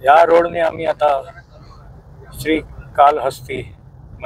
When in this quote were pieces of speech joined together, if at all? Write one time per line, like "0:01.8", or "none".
none